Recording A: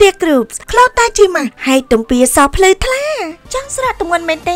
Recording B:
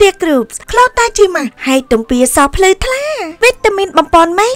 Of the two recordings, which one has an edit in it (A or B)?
B